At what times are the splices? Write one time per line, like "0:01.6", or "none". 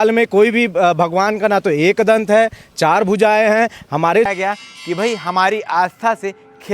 0:04.3